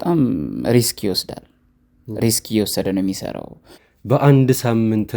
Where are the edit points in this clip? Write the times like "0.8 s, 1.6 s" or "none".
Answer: 3.8 s